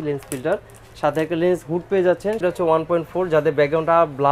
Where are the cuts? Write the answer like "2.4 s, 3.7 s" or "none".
2.4 s